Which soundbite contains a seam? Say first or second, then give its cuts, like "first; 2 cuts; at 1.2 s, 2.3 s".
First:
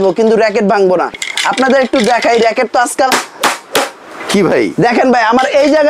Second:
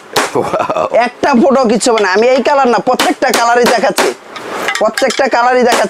first; 1 cut; at 1.1 s